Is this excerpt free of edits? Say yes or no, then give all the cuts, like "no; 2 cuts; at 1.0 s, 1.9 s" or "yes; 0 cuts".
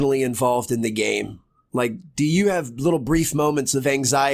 yes; 0 cuts